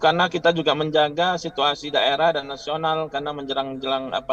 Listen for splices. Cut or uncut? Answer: uncut